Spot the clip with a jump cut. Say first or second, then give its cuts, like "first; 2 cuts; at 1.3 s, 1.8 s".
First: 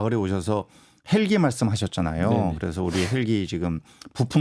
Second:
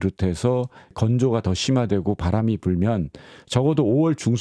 second; 1 cut; at 0.9 s